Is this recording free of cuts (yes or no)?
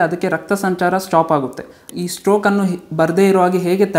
no